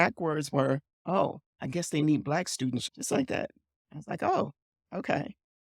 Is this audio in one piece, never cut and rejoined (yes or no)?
no